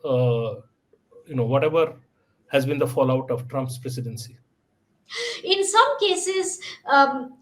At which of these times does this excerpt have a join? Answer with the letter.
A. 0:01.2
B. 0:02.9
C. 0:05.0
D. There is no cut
C